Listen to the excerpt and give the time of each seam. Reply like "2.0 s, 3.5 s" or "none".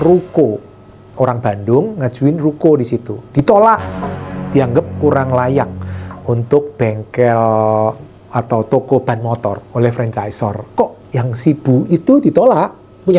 10.6 s